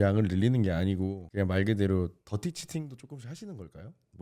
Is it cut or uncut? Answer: cut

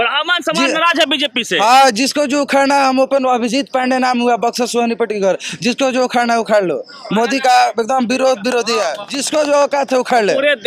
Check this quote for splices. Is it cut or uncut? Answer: cut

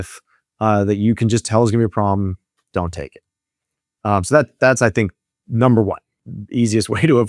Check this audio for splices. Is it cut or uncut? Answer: uncut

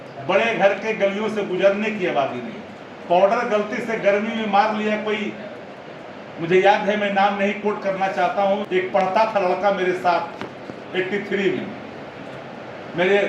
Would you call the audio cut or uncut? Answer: cut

